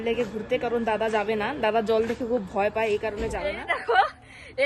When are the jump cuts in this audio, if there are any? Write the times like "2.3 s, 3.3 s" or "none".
3.4 s